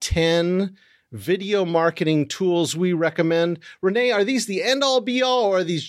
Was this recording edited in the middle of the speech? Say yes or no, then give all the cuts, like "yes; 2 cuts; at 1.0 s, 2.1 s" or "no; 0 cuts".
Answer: no; 0 cuts